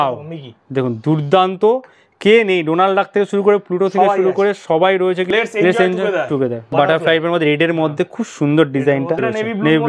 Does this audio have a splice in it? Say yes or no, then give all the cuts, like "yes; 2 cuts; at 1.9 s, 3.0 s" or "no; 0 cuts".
yes; 3 cuts; at 5.3 s, 6.7 s, 9.2 s